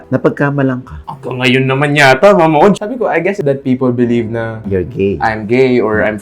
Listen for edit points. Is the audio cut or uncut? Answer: cut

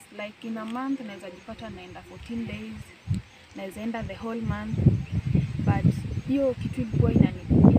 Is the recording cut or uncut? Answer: uncut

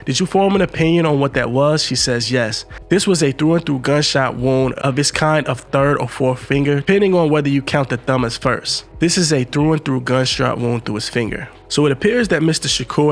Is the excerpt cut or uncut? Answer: uncut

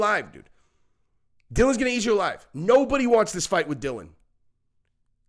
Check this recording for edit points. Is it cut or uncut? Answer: uncut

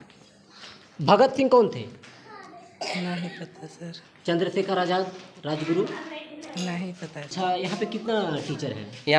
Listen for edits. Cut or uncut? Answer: cut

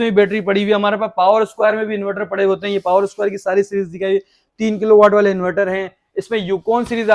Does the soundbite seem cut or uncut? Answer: uncut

